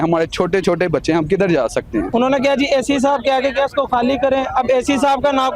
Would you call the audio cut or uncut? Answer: cut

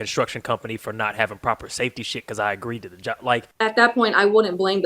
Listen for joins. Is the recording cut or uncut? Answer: cut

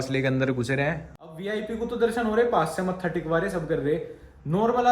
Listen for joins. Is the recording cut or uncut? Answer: cut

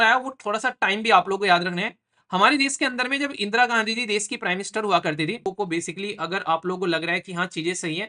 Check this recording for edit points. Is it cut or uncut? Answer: cut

